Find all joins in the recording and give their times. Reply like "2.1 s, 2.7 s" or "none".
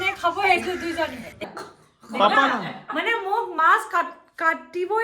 1.3 s